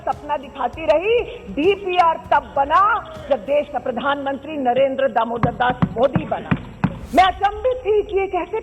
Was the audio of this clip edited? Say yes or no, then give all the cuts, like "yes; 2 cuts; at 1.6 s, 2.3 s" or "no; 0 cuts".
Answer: yes; 1 cut; at 7.0 s